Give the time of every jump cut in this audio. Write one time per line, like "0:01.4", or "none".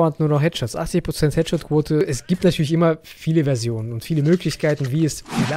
0:02.0